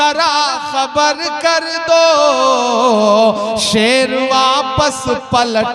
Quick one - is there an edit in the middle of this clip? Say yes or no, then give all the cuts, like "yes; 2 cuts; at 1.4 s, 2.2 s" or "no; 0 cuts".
no; 0 cuts